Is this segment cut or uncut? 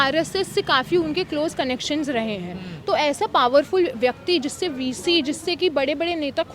uncut